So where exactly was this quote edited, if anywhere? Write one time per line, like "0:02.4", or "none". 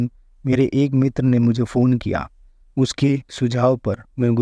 none